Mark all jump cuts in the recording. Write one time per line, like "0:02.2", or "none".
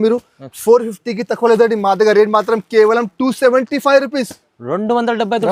none